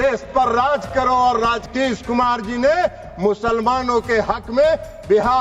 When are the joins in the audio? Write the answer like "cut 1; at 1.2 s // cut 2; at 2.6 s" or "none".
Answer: cut 1; at 1.7 s